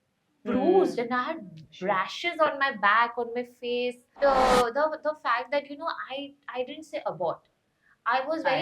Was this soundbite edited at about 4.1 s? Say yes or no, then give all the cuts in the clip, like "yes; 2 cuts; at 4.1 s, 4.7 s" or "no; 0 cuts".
yes; 1 cut; at 4.1 s